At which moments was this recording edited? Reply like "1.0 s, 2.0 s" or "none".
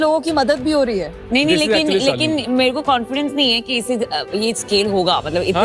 none

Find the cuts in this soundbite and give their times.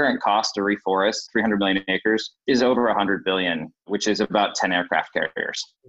1.3 s, 2.4 s, 3.7 s

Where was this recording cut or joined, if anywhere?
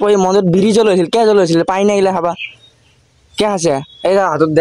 none

